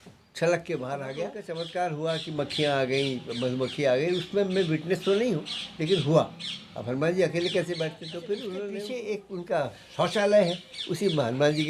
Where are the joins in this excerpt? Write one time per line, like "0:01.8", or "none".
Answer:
0:01.4
0:08.7